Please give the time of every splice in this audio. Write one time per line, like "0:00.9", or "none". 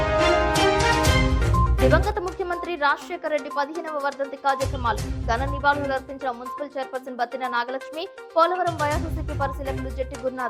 0:01.7